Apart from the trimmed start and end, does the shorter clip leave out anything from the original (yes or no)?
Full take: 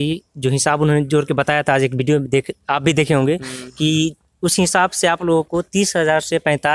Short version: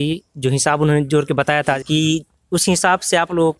yes